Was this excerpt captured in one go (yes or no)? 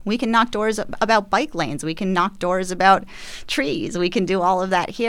yes